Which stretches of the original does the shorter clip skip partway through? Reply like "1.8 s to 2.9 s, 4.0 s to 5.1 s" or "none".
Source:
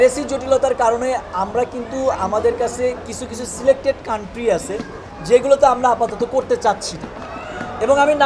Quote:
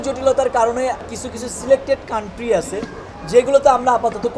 1.3 s to 3.0 s